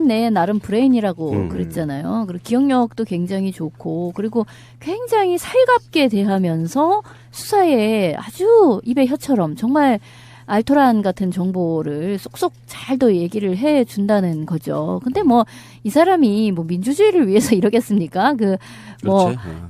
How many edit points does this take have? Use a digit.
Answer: 1